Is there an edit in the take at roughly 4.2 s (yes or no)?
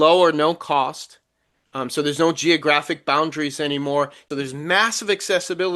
yes